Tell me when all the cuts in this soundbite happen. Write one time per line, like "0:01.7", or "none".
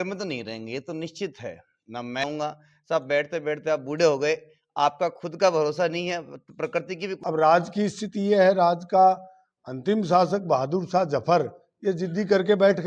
0:02.2
0:07.2